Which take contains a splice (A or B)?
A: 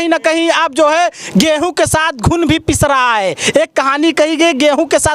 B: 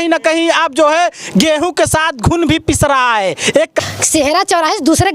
B